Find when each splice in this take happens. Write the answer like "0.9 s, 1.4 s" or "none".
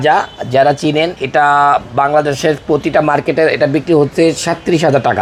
none